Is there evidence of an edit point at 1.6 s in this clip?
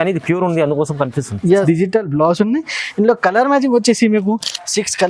yes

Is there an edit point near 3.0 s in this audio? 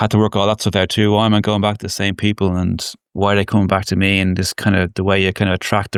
no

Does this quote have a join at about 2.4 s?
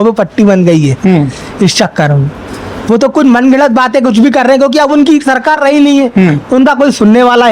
no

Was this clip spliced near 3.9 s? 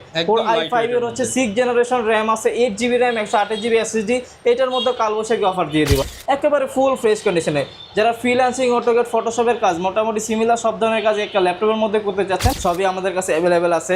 no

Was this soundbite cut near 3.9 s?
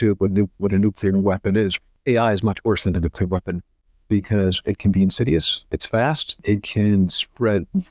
no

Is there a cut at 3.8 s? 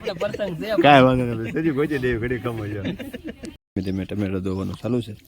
yes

